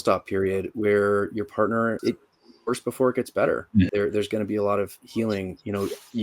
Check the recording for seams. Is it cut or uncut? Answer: cut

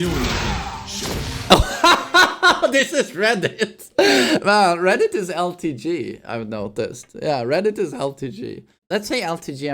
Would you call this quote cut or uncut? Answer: cut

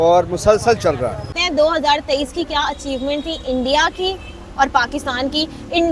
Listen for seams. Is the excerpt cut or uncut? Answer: cut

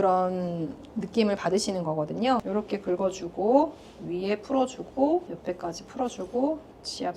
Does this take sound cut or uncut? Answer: cut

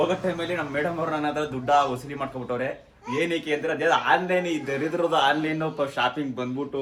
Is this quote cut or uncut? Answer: uncut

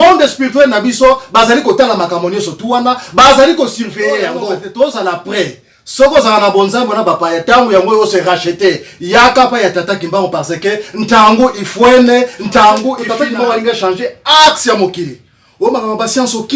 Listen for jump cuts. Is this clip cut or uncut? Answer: cut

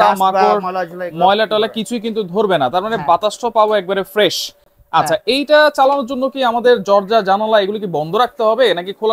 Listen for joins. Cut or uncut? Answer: uncut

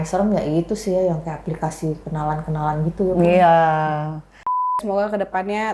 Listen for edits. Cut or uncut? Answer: cut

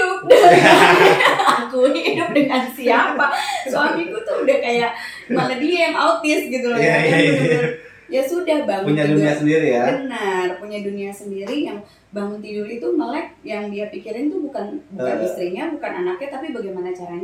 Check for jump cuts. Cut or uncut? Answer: uncut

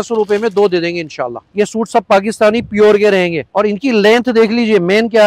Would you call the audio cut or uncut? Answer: cut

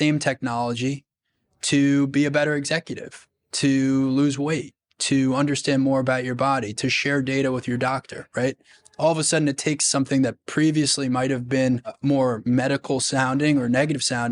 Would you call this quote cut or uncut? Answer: cut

